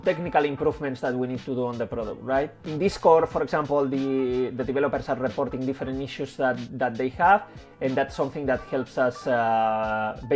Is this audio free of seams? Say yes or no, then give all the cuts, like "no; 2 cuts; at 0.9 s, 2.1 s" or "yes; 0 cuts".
yes; 0 cuts